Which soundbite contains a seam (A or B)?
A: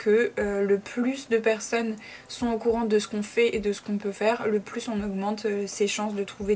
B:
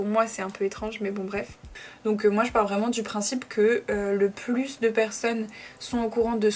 B